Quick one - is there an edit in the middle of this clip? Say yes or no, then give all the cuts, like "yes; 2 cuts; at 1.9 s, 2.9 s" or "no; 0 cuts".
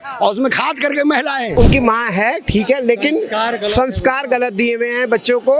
yes; 1 cut; at 1.5 s